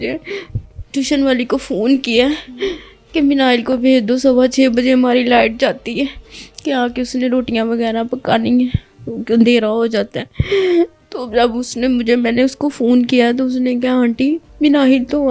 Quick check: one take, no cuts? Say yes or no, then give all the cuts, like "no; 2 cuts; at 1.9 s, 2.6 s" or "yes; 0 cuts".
yes; 0 cuts